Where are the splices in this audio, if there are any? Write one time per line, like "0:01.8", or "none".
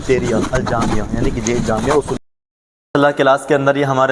0:02.2

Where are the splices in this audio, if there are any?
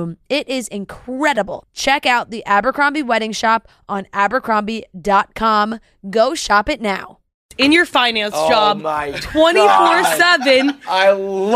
0:07.5

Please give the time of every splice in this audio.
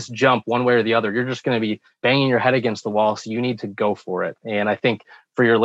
0:01.9

